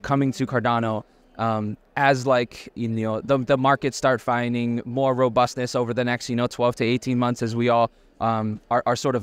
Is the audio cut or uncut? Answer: uncut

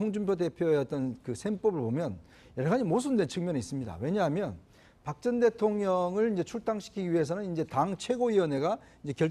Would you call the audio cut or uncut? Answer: uncut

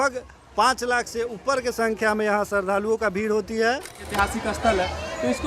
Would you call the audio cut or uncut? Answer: cut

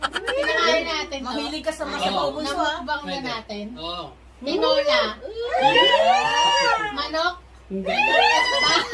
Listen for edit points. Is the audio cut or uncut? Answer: uncut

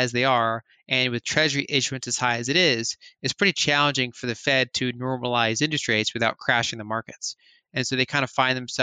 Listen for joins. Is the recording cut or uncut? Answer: uncut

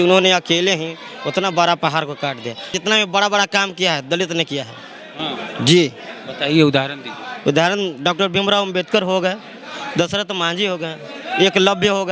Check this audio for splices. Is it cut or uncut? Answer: cut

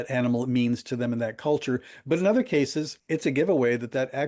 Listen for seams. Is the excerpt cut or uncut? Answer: cut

